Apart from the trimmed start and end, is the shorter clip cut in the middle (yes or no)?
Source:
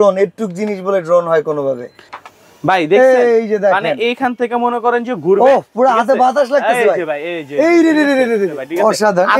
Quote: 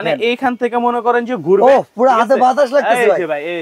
no